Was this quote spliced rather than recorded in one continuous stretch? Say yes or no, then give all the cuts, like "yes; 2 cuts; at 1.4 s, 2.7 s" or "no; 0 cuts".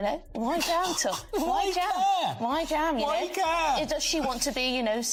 no; 0 cuts